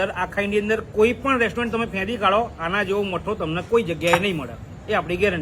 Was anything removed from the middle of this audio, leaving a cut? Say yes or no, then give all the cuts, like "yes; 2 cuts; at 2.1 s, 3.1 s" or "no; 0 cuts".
no; 0 cuts